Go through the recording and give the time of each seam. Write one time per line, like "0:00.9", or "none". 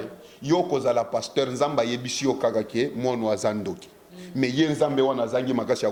none